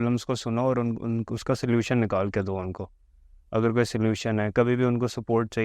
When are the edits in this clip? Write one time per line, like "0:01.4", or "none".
none